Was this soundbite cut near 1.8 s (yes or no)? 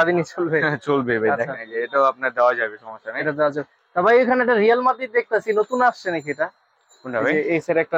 no